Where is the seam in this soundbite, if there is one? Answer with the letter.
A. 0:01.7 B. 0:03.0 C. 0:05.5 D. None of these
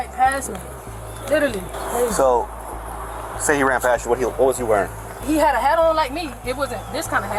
D